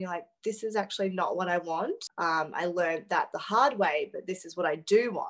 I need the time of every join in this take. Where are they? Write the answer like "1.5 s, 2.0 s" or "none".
2.1 s